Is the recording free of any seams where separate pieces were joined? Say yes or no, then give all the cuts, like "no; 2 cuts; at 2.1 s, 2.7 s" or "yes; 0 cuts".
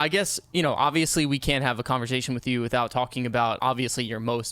no; 1 cut; at 3.6 s